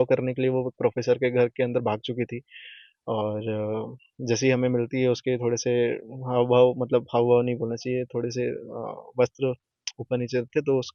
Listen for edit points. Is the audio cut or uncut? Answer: uncut